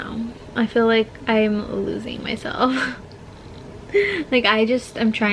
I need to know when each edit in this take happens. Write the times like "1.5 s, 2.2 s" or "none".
none